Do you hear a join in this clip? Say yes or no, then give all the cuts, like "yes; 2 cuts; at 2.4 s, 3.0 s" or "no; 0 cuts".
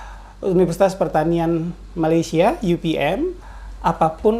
yes; 1 cut; at 3.5 s